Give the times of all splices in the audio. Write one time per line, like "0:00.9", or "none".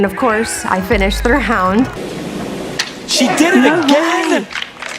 0:02.0